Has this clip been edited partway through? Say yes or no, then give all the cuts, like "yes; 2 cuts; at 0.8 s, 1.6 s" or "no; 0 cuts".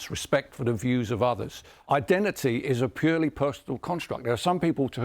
yes; 1 cut; at 1.7 s